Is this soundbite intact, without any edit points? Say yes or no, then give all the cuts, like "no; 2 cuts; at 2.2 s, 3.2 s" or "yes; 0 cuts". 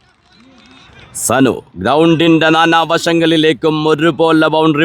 no; 1 cut; at 1.0 s